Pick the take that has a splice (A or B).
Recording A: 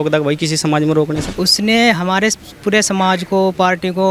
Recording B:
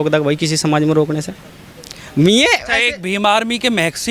A